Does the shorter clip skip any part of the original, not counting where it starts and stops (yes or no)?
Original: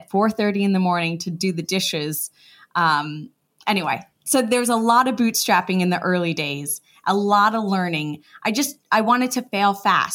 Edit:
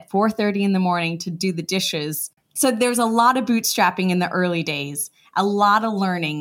yes